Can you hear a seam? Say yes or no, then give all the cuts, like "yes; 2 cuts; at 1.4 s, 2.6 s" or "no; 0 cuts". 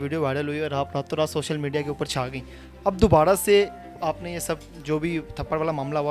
no; 0 cuts